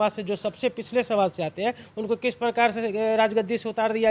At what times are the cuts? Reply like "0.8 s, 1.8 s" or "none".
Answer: none